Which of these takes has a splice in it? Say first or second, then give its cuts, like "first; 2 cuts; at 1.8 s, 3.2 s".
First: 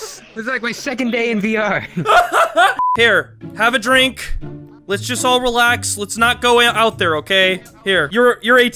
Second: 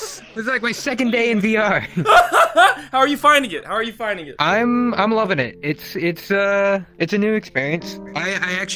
first; 1 cut; at 2.9 s